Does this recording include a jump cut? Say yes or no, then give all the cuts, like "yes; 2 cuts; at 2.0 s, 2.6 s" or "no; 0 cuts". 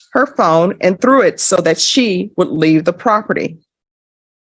no; 0 cuts